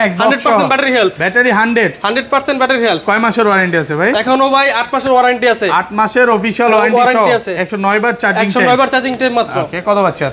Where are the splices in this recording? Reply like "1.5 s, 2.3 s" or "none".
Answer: none